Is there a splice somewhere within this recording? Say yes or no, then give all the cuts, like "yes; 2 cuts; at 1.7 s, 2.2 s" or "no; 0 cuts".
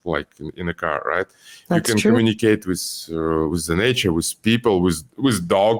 no; 0 cuts